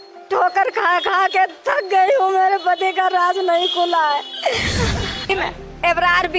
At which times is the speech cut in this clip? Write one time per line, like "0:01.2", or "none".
0:05.3